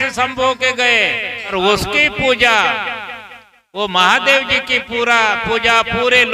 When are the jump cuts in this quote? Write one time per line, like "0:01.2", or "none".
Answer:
0:01.5